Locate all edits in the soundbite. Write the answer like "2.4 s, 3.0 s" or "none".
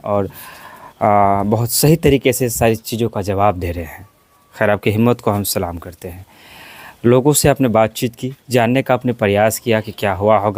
none